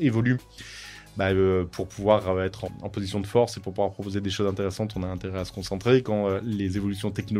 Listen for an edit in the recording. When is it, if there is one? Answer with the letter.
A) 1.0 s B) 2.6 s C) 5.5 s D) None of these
B